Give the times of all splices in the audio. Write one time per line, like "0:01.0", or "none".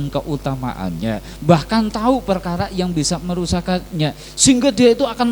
none